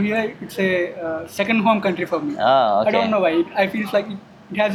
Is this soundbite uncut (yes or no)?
yes